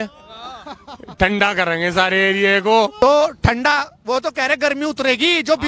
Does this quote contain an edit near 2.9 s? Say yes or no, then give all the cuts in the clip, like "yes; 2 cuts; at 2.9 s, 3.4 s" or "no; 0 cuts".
yes; 1 cut; at 2.9 s